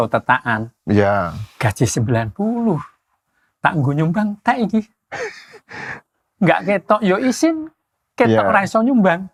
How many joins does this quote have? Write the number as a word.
zero